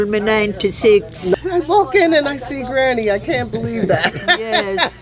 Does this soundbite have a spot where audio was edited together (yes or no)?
yes